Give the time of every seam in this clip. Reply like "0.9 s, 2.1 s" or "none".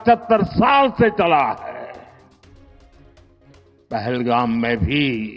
2.2 s, 3.9 s